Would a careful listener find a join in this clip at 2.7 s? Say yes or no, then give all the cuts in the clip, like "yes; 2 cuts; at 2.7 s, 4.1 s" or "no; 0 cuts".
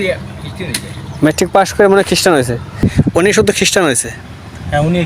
yes; 1 cut; at 2.7 s